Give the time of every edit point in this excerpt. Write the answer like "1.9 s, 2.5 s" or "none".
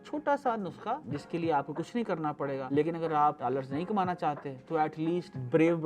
1.0 s